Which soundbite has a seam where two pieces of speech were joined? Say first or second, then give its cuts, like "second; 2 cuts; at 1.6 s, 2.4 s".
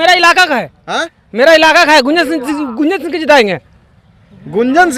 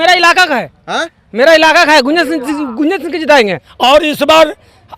second; 1 cut; at 3.6 s